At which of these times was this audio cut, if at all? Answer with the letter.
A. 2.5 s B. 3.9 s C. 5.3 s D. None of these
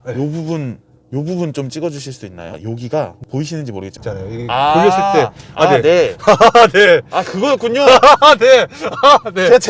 B